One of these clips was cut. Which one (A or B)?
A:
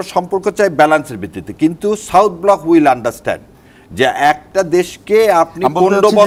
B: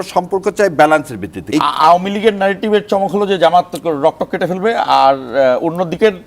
B